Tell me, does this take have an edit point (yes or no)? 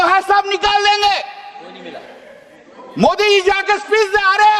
no